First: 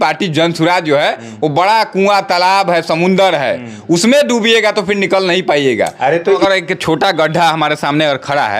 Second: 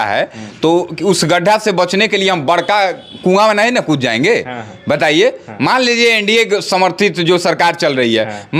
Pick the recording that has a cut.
first; 1 cut; at 6.4 s

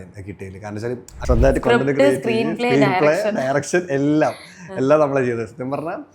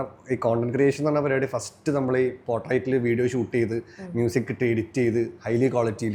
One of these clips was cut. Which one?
first; 1 cut; at 1.1 s

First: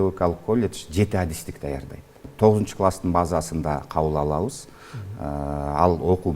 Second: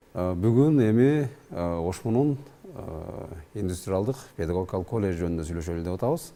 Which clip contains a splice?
first; 1 cut; at 2.2 s

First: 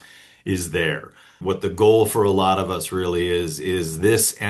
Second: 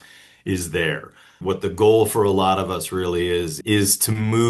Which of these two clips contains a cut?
second; 1 cut; at 3.6 s

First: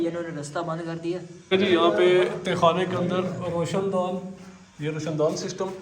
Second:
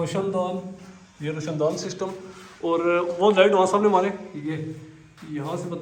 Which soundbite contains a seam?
first; 1 cut; at 1.3 s

